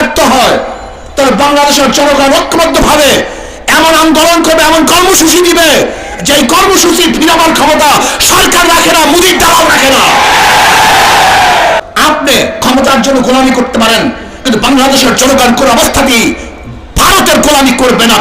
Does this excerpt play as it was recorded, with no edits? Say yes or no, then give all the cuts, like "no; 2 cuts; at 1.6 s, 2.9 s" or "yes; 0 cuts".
no; 1 cut; at 11.8 s